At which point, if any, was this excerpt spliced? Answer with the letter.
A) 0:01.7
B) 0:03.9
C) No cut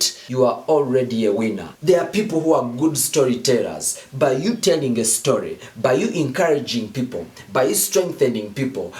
A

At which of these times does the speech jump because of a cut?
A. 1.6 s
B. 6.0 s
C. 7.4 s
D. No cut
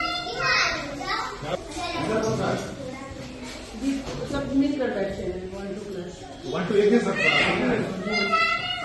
A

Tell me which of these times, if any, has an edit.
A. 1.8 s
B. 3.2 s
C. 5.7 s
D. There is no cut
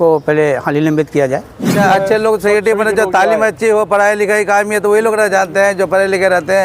A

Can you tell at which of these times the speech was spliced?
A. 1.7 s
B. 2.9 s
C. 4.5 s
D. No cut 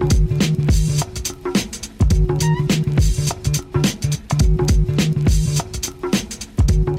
C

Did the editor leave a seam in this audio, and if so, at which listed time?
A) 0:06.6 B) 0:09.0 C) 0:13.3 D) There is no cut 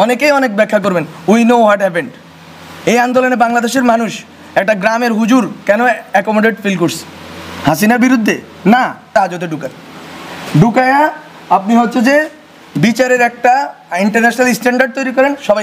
B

